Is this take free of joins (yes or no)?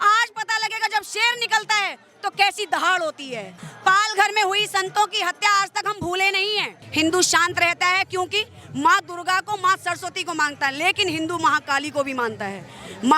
no